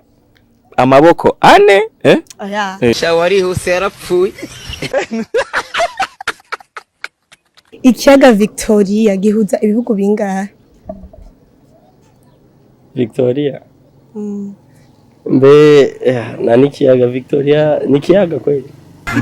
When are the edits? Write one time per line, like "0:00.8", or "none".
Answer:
0:07.8